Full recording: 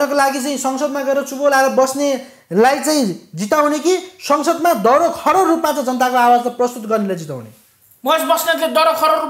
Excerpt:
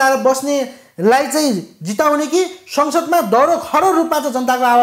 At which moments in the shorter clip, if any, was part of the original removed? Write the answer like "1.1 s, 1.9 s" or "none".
none